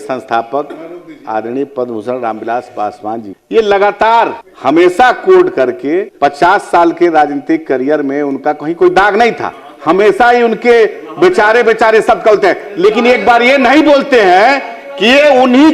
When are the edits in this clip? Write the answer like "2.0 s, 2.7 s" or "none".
3.3 s, 4.5 s, 6.1 s